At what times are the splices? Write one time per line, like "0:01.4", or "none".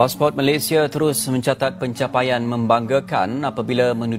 none